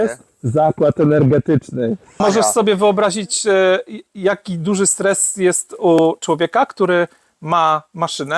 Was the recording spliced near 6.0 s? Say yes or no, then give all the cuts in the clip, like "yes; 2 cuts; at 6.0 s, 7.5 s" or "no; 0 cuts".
no; 1 cut; at 2.2 s